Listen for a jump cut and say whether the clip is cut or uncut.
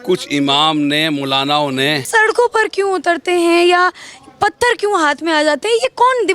cut